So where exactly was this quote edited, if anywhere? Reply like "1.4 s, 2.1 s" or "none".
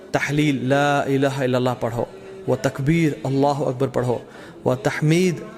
none